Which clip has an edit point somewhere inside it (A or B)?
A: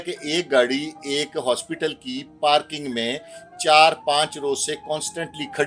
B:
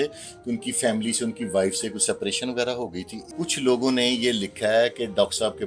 B